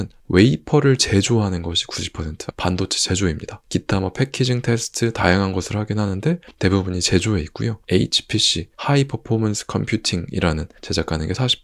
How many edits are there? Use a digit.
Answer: 3